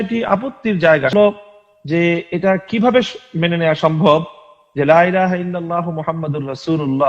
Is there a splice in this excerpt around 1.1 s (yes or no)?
yes